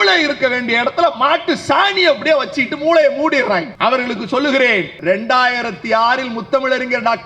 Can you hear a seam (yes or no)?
yes